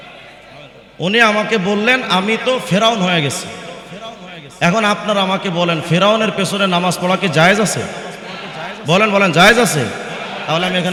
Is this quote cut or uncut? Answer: uncut